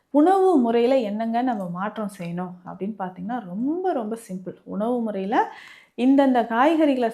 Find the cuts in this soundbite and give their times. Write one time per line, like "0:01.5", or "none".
none